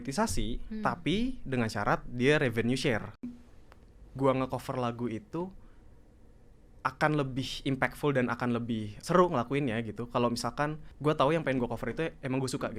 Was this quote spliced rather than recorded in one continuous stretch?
yes; 3 cuts; at 3.4 s, 8.9 s, 10.9 s

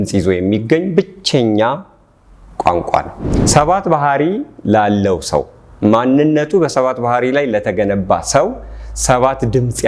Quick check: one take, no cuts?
no; 1 cut; at 3.2 s

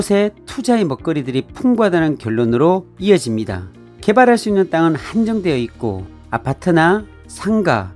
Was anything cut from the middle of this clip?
no; 0 cuts

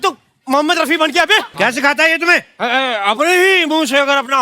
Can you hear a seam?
yes; 1 cut; at 1.5 s

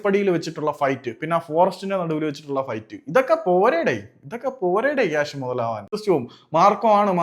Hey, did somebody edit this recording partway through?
yes; 1 cut; at 6.0 s

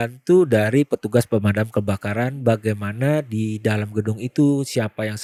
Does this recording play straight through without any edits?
yes; 0 cuts

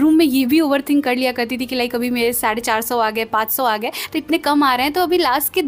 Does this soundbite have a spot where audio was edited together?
no; 0 cuts

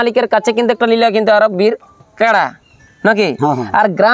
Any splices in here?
no; 0 cuts

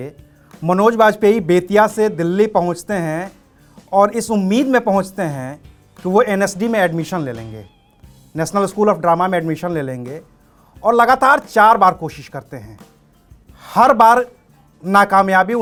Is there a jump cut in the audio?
no; 0 cuts

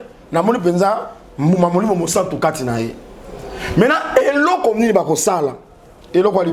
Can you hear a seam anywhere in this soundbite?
no; 0 cuts

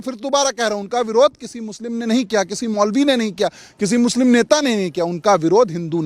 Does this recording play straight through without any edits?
yes; 0 cuts

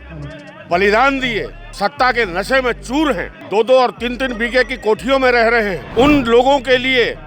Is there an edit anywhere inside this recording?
yes; 3 cuts; at 1.6 s, 3.3 s, 5.8 s

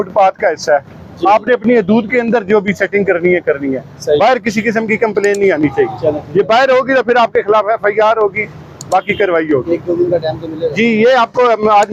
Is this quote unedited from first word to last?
yes; 0 cuts

